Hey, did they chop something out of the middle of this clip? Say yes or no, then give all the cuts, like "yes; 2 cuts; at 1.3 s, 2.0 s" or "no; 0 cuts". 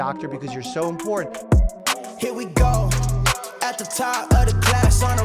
yes; 1 cut; at 1.3 s